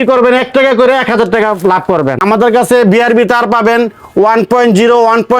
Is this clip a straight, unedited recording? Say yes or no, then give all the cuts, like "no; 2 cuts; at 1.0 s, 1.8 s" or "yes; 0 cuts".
no; 1 cut; at 2.1 s